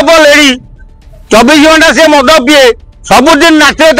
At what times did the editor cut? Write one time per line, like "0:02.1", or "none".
0:02.9